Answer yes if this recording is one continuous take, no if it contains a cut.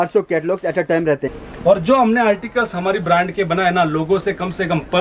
no